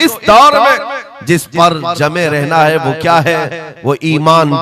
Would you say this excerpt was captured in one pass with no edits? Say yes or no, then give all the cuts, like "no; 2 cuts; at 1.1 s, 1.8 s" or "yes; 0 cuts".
yes; 0 cuts